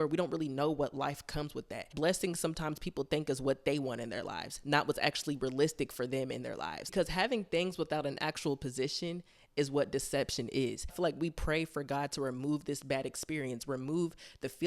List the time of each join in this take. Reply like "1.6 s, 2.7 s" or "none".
1.9 s, 6.8 s, 10.9 s